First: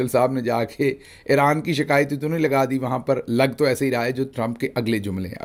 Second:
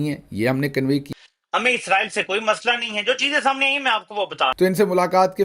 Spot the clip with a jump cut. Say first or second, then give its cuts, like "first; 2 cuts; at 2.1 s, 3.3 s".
second; 2 cuts; at 1.1 s, 4.5 s